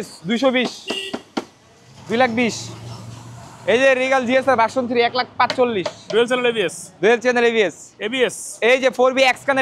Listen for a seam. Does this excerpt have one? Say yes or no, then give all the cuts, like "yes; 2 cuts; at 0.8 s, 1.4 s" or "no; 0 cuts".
no; 0 cuts